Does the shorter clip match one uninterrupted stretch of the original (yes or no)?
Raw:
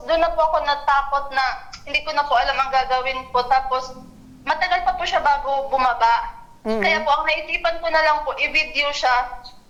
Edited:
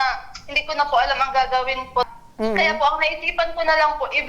no